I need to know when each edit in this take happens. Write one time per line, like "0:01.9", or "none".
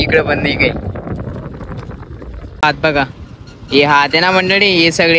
0:02.6